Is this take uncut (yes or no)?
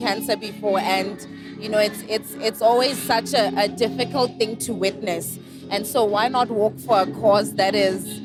yes